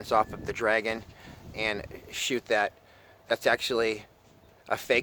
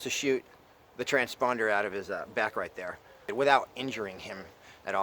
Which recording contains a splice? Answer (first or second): second